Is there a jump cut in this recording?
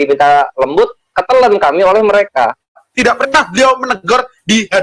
yes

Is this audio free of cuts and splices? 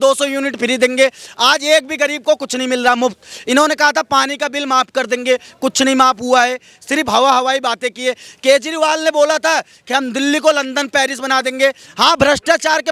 yes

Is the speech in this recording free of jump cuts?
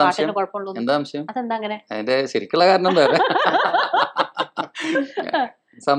yes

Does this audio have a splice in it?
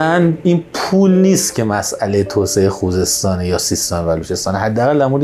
no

